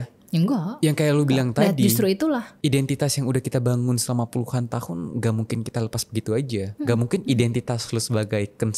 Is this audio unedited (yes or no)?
yes